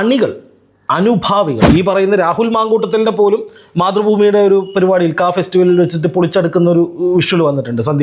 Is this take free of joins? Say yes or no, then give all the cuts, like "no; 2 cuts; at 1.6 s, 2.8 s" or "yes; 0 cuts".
no; 1 cut; at 1.6 s